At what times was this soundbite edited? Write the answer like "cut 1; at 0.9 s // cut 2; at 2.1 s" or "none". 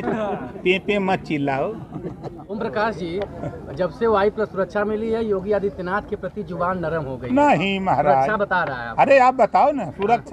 cut 1; at 2.4 s